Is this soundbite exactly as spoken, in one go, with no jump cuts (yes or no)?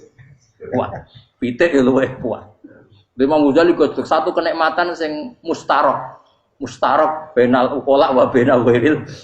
yes